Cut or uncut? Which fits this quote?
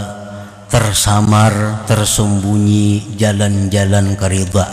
uncut